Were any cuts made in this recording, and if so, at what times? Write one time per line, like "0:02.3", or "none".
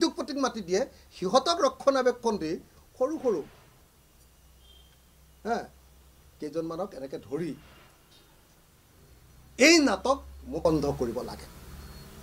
0:10.7